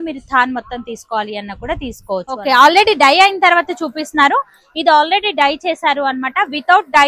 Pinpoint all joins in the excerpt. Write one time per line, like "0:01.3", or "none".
0:02.4